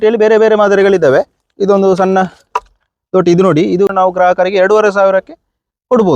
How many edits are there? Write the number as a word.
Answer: one